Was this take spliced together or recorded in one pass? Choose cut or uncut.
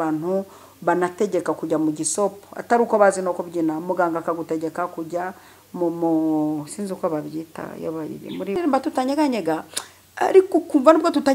cut